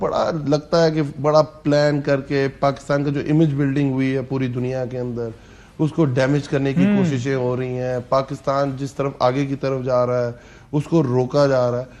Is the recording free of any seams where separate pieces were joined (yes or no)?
yes